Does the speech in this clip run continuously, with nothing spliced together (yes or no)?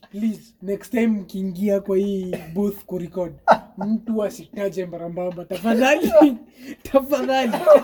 yes